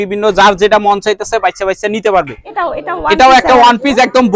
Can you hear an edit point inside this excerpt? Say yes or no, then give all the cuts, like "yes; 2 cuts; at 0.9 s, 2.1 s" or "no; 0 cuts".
yes; 1 cut; at 2.4 s